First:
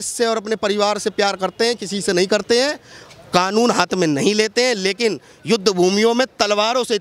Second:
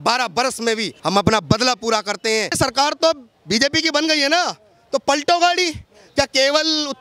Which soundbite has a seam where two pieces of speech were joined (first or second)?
second